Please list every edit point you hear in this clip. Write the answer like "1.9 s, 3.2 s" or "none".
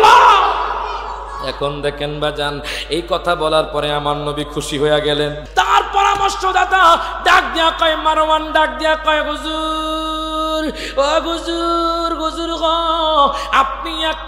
5.4 s